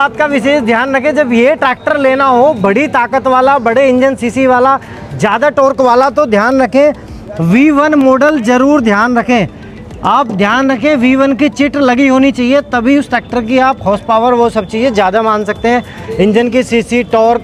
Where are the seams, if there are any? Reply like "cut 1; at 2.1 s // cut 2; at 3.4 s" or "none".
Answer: none